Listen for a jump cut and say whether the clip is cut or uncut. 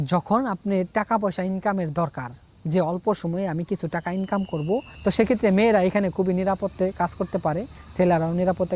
cut